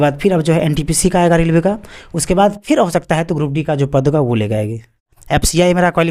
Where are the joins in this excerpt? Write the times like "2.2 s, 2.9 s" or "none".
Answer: 5.2 s